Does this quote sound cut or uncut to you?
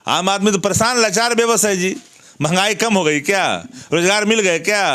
uncut